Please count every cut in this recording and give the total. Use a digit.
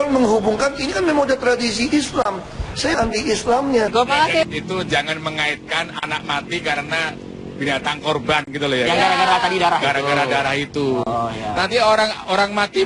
2